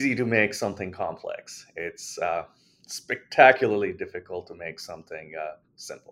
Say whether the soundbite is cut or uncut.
uncut